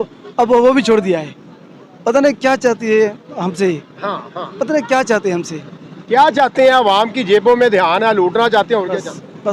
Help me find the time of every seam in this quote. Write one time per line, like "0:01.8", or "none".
none